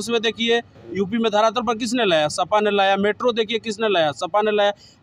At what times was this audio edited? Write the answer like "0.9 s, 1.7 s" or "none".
none